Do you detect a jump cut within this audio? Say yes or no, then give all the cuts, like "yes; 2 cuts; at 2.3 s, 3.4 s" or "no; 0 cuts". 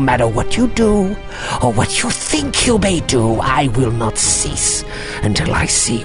no; 0 cuts